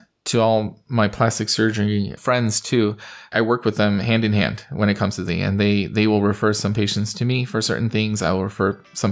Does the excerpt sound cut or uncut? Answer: uncut